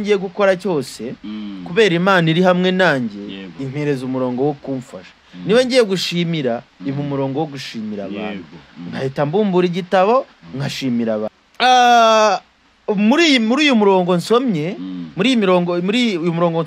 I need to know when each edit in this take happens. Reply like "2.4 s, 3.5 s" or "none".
11.4 s

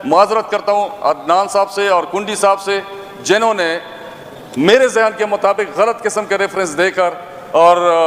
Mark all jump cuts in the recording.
none

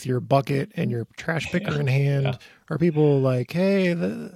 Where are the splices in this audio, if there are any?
none

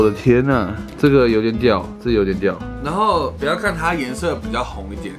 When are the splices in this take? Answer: 2.8 s

